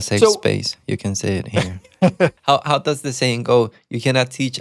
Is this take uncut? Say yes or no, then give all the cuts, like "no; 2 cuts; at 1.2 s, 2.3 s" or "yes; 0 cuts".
no; 1 cut; at 2.4 s